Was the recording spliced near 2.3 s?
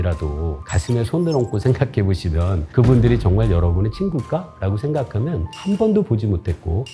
no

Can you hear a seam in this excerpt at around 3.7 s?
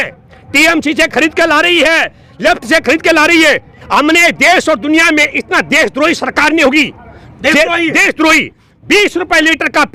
yes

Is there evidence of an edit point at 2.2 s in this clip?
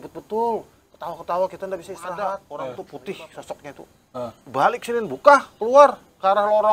yes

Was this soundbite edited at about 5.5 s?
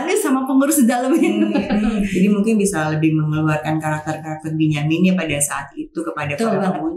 no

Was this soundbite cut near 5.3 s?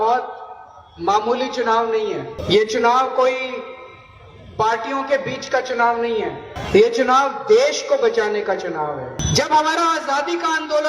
no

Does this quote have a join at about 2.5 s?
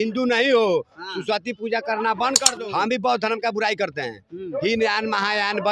yes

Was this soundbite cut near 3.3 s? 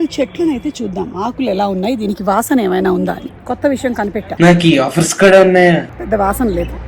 yes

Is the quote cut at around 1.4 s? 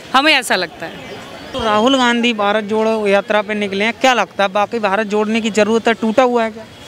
yes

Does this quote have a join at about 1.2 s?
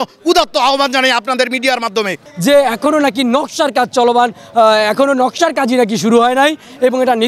no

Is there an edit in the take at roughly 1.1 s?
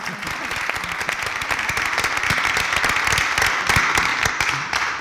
no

